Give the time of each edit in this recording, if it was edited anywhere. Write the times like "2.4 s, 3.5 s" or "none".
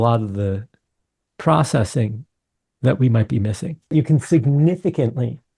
3.9 s